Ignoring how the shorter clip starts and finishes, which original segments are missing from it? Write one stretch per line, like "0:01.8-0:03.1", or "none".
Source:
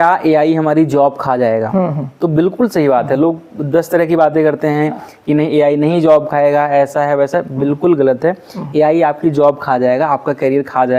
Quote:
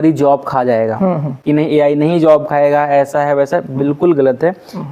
0:02.0-0:05.1